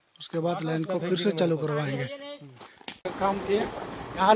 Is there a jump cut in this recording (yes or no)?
yes